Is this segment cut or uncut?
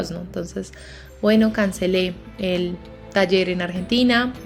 uncut